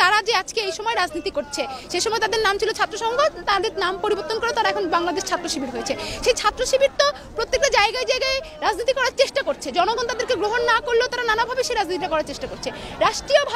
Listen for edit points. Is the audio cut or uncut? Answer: uncut